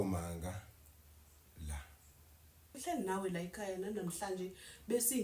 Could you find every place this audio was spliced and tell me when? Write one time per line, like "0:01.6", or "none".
0:02.8